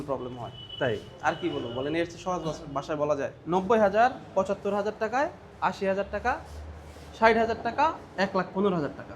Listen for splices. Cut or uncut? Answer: cut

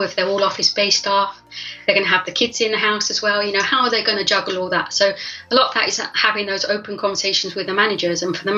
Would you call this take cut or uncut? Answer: uncut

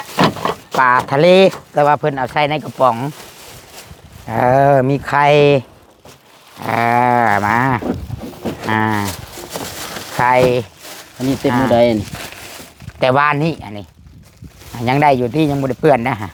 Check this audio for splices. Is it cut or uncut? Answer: uncut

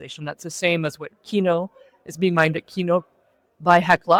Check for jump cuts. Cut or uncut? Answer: uncut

